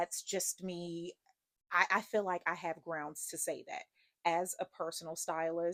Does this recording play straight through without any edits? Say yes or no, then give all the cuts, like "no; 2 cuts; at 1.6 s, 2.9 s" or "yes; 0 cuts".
yes; 0 cuts